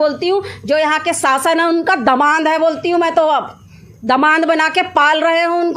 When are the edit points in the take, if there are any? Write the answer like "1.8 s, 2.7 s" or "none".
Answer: none